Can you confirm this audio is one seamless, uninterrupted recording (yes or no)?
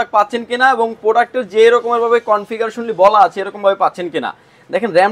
yes